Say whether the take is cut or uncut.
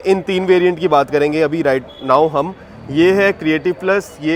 uncut